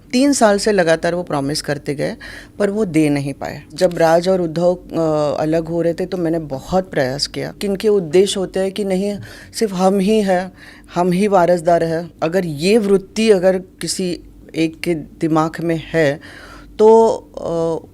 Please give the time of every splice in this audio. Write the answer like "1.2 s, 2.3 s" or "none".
3.7 s, 7.6 s, 12.1 s